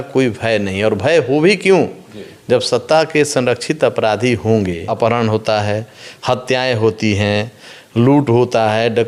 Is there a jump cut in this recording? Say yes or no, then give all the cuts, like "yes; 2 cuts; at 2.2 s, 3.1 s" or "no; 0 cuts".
yes; 1 cut; at 4.9 s